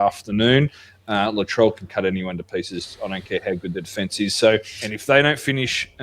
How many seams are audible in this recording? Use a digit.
1